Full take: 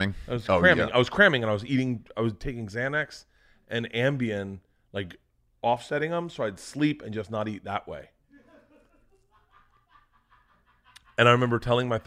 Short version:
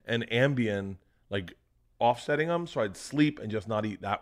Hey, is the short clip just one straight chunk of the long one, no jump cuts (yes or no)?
yes